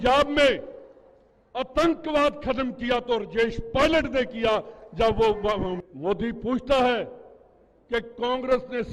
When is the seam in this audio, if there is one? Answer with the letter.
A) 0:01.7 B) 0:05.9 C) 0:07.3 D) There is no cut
B